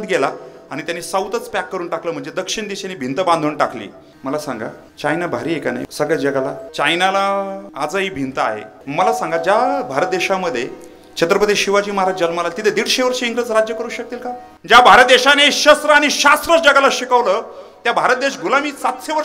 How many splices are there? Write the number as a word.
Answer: seven